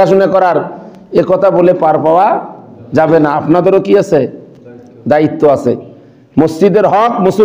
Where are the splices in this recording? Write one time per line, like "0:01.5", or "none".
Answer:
none